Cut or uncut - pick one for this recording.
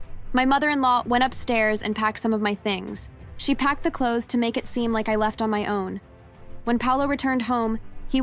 cut